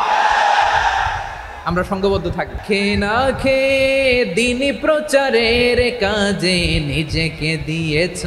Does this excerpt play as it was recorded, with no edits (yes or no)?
no